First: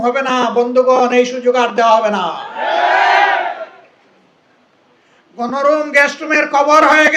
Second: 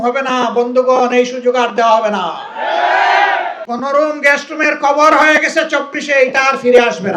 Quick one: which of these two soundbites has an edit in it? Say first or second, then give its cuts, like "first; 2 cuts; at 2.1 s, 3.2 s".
second; 1 cut; at 3.6 s